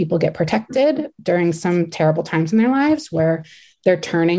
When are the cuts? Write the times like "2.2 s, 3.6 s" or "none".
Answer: none